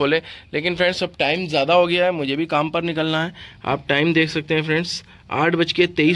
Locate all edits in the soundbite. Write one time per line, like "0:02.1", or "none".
none